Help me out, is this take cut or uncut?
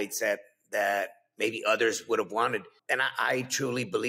cut